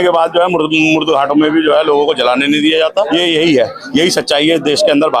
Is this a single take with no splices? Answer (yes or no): no